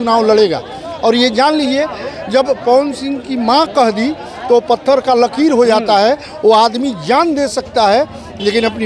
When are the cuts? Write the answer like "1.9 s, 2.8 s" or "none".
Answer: none

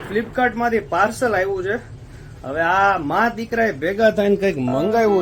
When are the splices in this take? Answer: none

